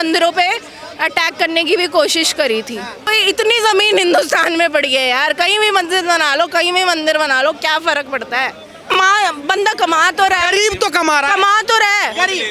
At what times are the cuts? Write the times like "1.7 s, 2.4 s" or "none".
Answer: 3.1 s, 9.0 s